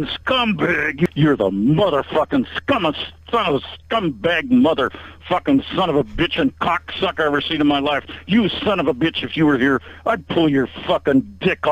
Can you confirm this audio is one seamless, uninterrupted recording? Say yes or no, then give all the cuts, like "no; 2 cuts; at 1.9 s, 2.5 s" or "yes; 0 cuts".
no; 1 cut; at 1.1 s